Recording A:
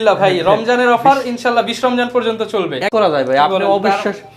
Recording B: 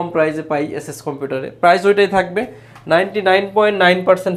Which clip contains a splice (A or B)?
A